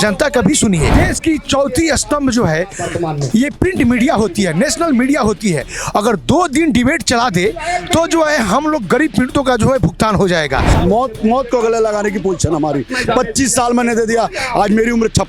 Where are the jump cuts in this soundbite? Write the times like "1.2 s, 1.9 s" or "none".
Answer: 0.9 s, 10.7 s